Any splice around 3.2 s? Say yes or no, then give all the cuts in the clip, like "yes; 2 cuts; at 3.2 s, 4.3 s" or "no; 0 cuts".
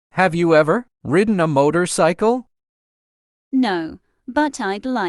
no; 1 cut; at 0.9 s